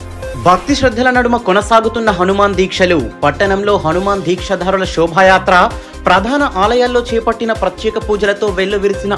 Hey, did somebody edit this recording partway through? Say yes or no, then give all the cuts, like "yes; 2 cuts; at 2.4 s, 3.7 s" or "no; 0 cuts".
no; 0 cuts